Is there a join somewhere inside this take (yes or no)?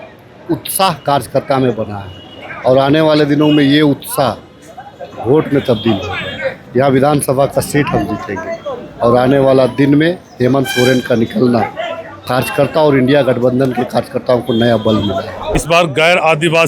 yes